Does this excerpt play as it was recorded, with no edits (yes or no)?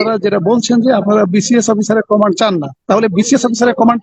no